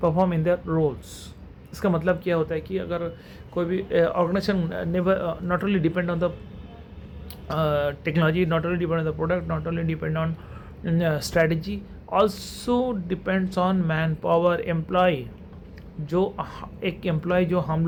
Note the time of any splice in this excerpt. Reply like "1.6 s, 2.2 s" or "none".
none